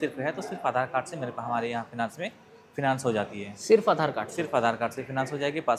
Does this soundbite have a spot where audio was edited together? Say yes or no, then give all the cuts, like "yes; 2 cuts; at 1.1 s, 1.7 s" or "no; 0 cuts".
no; 0 cuts